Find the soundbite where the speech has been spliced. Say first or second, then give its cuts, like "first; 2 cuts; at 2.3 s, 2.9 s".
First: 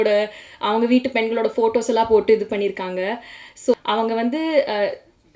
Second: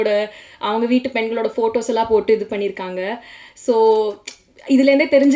first; 1 cut; at 3.7 s